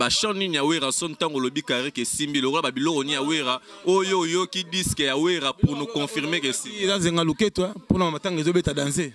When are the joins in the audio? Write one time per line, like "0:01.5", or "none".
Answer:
none